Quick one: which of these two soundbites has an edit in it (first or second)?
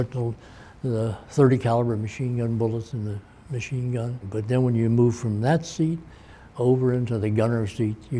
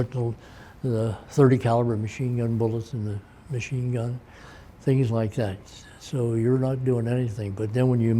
first